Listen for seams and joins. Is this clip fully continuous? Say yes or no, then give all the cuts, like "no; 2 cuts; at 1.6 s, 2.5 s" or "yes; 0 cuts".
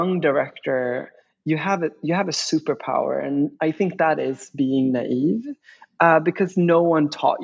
yes; 0 cuts